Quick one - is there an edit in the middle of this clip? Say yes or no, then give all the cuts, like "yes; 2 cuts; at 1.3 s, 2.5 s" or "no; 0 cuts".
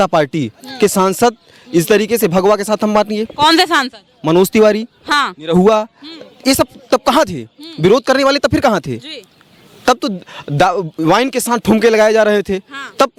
no; 0 cuts